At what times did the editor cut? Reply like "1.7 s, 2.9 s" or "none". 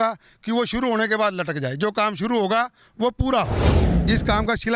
3.8 s